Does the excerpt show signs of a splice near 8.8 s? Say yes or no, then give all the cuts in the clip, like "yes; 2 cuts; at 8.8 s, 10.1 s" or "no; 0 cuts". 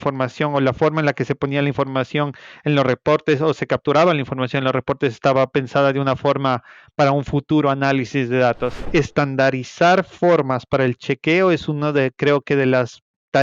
yes; 1 cut; at 8.8 s